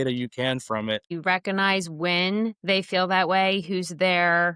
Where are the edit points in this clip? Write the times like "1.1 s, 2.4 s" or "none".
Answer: 1.1 s